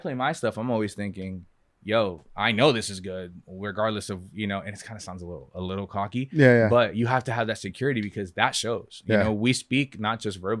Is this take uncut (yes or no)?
yes